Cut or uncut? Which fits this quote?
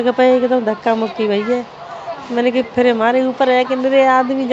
uncut